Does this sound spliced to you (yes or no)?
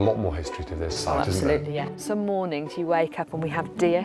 yes